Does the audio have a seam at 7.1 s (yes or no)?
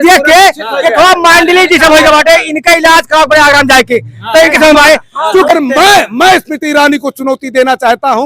no